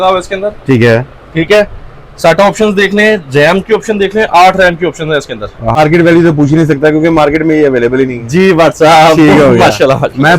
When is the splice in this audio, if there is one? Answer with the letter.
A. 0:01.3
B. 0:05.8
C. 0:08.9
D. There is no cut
B